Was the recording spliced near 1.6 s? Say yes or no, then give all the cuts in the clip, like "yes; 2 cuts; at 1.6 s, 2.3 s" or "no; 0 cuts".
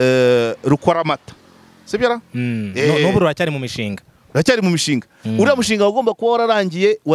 no; 0 cuts